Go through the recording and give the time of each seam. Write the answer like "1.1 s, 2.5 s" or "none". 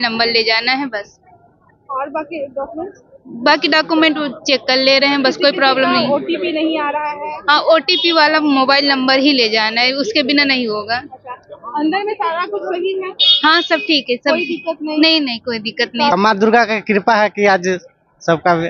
16.1 s